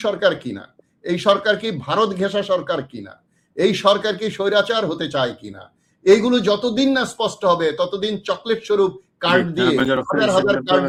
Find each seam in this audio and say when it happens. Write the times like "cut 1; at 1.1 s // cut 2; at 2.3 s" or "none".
none